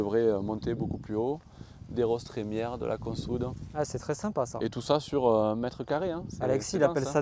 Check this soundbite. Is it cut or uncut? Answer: uncut